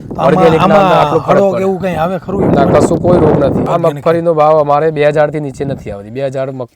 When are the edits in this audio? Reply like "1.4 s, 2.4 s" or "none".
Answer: 3.6 s